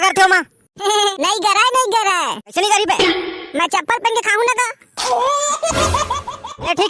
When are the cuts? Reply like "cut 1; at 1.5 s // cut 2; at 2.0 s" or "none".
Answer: none